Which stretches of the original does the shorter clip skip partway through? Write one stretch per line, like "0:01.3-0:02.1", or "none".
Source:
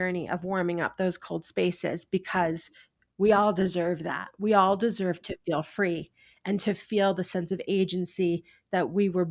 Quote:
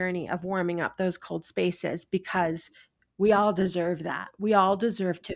none